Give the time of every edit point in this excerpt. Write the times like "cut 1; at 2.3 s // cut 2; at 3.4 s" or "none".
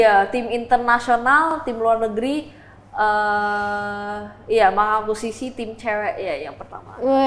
none